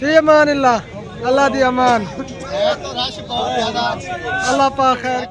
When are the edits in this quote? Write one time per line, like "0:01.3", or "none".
none